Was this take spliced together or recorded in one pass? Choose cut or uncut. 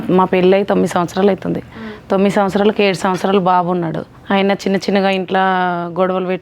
cut